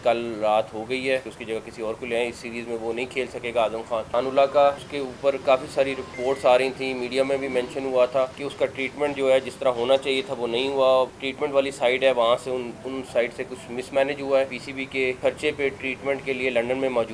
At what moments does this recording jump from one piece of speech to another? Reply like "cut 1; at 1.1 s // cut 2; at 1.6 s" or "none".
cut 1; at 1.3 s // cut 2; at 4.1 s // cut 3; at 4.9 s // cut 4; at 6.1 s // cut 5; at 8.4 s // cut 6; at 11.2 s // cut 7; at 14.8 s